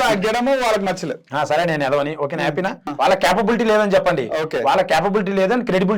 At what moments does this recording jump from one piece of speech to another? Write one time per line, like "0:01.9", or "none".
0:02.9